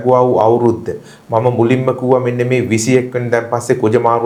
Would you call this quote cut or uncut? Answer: uncut